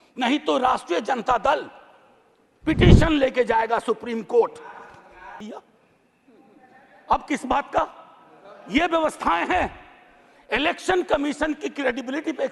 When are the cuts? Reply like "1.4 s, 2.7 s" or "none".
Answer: 5.4 s